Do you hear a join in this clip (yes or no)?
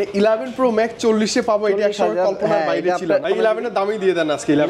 yes